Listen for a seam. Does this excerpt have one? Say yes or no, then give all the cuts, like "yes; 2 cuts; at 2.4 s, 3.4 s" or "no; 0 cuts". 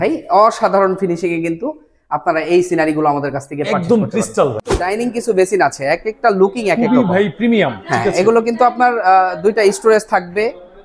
yes; 1 cut; at 4.7 s